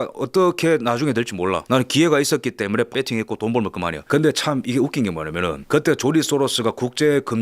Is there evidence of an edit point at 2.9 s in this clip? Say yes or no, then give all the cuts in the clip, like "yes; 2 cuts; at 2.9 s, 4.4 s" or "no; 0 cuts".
yes; 1 cut; at 2.9 s